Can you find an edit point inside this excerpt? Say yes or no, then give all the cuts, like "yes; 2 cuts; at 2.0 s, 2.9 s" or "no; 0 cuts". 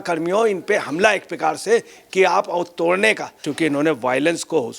yes; 1 cut; at 3.4 s